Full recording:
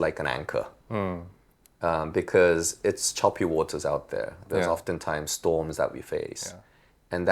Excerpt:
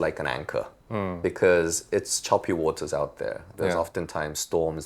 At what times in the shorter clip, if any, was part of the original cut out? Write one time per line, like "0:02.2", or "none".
0:01.2